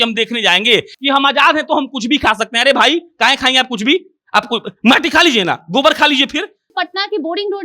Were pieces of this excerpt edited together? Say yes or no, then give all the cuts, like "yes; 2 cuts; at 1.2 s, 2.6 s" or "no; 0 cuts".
yes; 2 cuts; at 0.9 s, 6.7 s